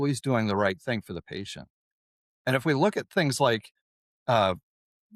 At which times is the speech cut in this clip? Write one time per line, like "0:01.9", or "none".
none